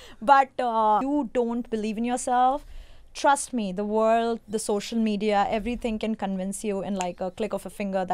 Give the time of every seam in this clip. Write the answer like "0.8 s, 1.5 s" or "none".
1.0 s